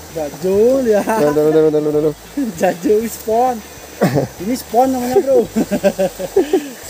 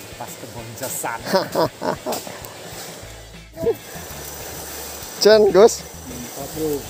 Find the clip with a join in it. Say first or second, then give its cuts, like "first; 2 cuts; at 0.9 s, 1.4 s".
second; 1 cut; at 3.5 s